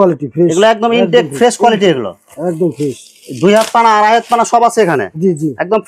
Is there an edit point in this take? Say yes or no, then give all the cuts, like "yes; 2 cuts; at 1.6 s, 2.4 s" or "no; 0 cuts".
no; 0 cuts